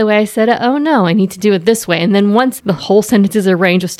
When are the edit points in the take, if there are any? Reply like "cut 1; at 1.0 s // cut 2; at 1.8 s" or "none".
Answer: cut 1; at 2.7 s